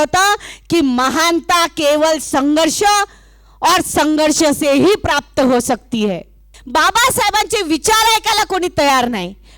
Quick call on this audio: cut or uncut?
cut